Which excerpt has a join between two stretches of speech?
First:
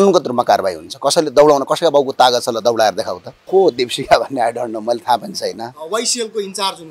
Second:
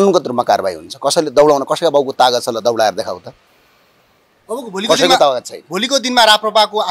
first; 1 cut; at 3.3 s

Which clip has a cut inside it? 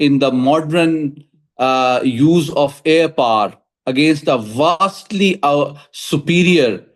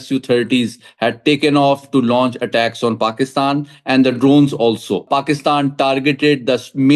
second; 1 cut; at 5.0 s

